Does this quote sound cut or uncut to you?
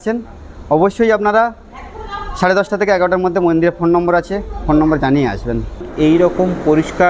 cut